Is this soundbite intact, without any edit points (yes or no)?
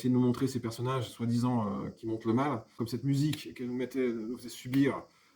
no